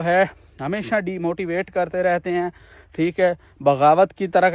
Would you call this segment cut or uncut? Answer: uncut